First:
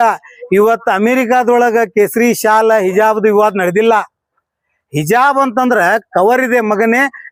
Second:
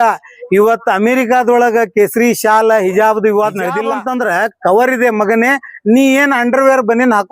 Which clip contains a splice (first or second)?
second